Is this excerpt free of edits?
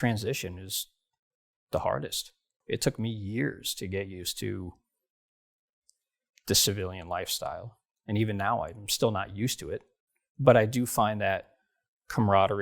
no; 1 cut; at 2.6 s

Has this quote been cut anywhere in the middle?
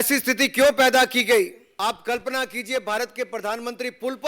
yes; 1 cut; at 1.6 s

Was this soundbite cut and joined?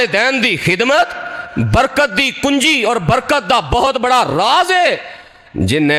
no; 0 cuts

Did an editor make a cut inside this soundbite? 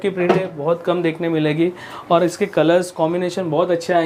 no; 0 cuts

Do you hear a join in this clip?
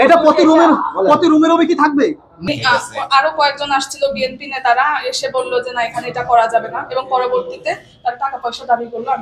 yes; 1 cut; at 2.4 s

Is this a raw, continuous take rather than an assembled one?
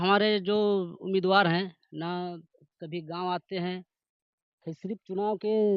yes; 0 cuts

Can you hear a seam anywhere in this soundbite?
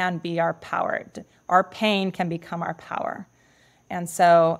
no; 0 cuts

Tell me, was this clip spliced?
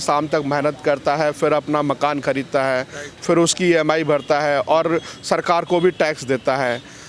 no; 0 cuts

